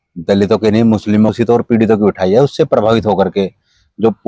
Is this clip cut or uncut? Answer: cut